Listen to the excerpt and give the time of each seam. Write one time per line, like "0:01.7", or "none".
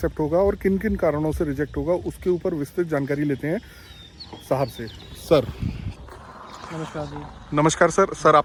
none

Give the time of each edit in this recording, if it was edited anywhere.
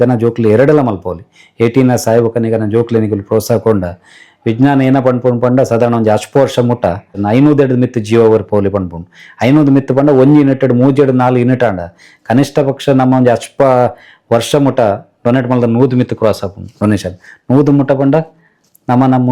0:07.1

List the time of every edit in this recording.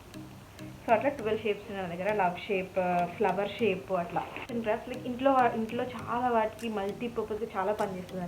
0:04.5

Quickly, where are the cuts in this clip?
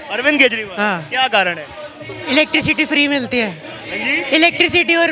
none

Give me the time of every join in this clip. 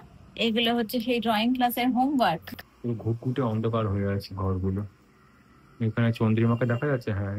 0:02.4

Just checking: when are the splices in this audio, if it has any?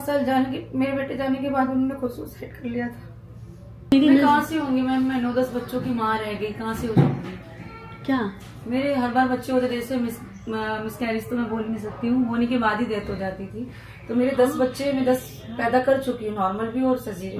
0:03.9

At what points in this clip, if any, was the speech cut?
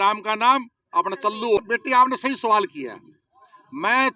0:01.6

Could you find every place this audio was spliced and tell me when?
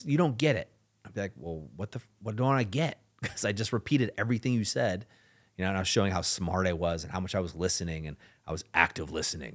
none

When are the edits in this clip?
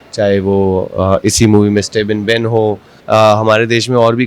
0:02.9

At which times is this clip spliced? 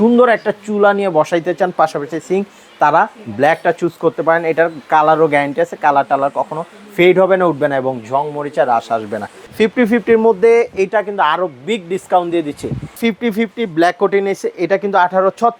0:09.4
0:13.0

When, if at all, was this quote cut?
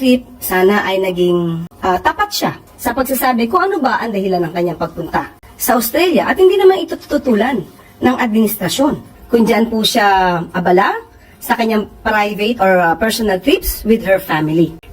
0:09.1

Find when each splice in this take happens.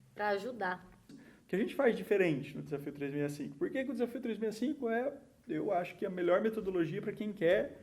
0:01.1

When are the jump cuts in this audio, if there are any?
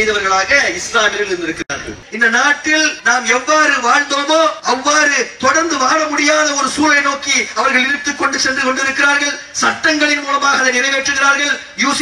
0:02.0
0:03.0
0:04.6

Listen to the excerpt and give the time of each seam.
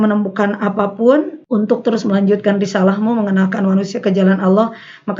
0:01.4

